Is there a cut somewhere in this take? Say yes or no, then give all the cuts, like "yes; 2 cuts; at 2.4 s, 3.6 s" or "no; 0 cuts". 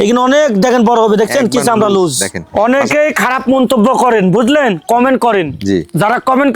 yes; 1 cut; at 2.4 s